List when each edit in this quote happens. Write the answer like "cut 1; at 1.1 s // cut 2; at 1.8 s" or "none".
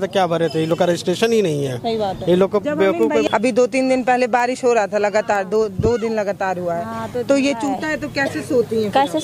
cut 1; at 3.3 s